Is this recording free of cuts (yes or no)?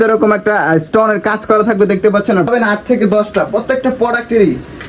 no